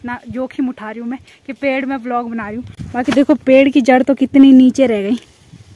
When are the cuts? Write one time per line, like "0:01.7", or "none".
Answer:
none